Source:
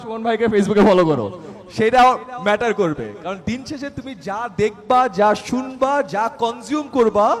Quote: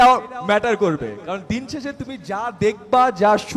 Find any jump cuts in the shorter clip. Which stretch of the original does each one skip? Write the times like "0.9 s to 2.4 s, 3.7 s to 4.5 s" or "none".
none